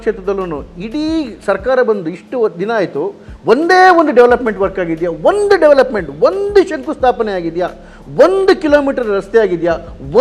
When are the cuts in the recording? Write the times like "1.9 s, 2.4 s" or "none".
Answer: none

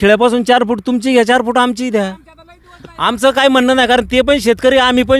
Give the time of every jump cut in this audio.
none

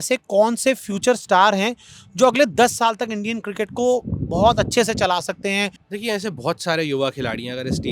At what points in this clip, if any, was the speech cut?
5.8 s

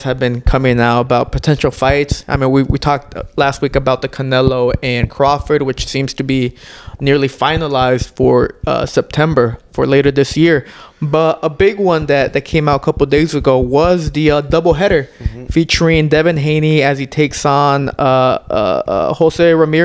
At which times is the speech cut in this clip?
none

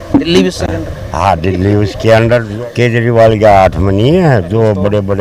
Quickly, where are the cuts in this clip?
2.5 s

